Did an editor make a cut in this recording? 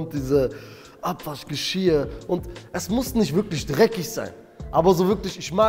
no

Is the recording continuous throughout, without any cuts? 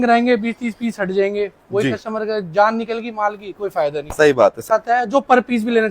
no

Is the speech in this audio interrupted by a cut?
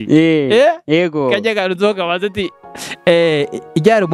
no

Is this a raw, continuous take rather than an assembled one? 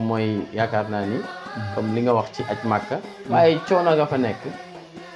yes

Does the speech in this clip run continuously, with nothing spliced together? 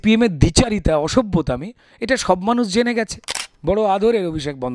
no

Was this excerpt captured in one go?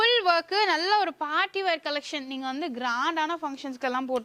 yes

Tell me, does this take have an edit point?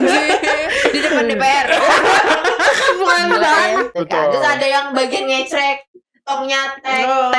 yes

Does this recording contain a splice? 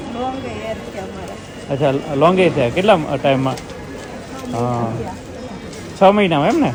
no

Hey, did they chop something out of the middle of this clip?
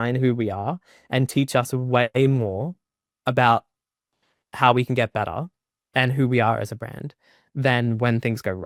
no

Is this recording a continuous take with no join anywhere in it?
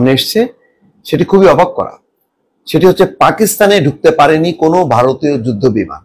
yes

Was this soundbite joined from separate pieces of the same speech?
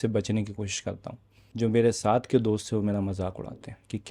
no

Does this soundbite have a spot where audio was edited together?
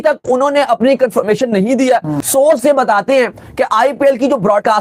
yes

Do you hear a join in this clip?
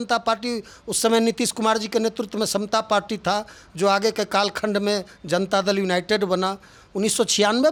no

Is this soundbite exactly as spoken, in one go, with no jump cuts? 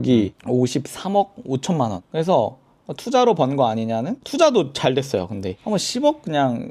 yes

